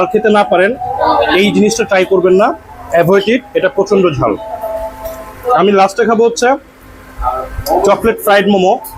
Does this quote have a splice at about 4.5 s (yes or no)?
no